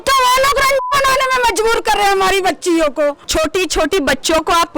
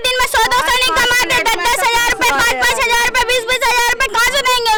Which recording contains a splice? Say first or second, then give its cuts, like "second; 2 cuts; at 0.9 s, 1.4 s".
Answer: first; 1 cut; at 3.2 s